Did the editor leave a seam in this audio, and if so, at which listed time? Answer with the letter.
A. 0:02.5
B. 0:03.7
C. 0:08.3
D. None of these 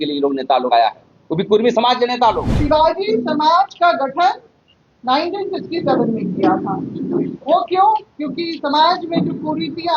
A